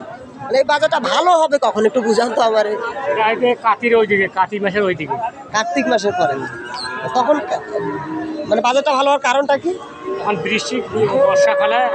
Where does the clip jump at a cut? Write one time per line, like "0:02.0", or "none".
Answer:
none